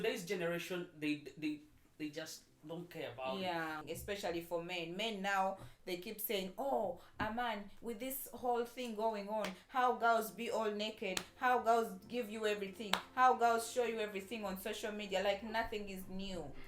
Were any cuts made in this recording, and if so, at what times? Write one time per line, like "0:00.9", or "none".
0:03.8